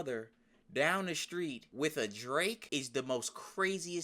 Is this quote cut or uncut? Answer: cut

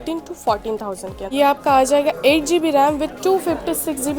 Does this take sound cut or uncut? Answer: cut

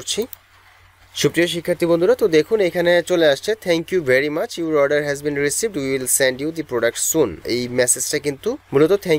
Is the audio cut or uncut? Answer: uncut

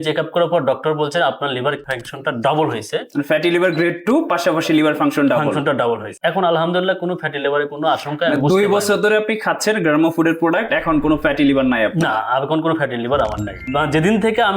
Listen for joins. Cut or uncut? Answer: cut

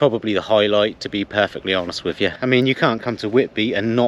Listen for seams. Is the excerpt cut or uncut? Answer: cut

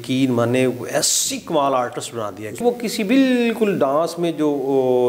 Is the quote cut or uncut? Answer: cut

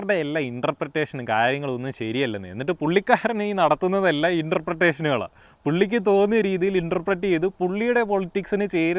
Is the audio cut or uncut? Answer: uncut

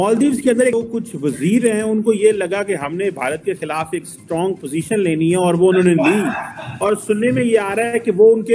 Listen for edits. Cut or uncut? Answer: uncut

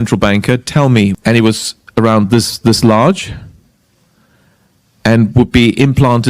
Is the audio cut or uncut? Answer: cut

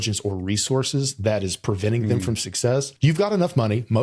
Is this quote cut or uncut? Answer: cut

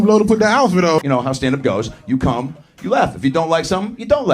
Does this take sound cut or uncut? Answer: cut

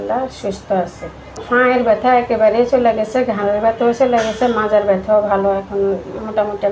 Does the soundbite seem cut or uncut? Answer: cut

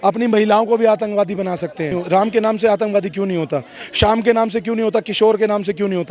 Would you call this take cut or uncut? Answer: cut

